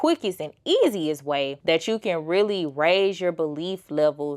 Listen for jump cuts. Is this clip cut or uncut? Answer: cut